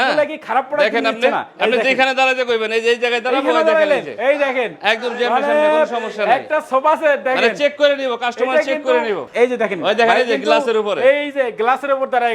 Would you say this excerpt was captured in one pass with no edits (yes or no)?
no